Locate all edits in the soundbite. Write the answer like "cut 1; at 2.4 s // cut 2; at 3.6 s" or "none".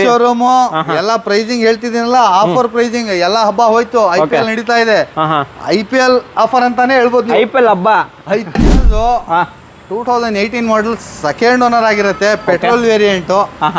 cut 1; at 8.6 s